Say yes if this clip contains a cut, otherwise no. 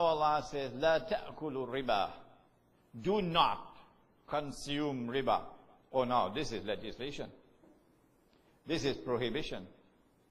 yes